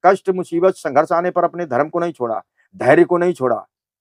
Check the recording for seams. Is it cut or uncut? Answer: uncut